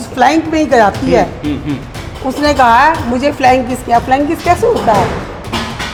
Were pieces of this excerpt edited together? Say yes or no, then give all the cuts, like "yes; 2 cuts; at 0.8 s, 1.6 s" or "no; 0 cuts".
no; 0 cuts